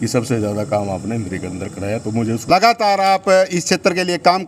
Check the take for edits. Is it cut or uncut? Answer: cut